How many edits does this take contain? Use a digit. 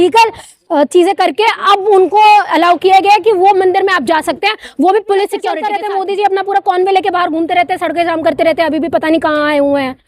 1